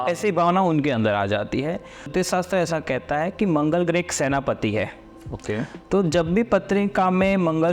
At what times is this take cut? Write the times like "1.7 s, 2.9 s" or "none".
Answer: 2.1 s